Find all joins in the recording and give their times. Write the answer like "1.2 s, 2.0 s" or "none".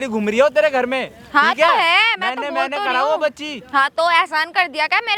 none